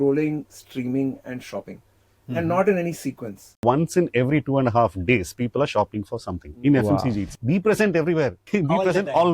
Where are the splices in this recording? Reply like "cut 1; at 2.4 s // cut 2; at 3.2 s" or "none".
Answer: cut 1; at 3.6 s // cut 2; at 7.3 s // cut 3; at 8.4 s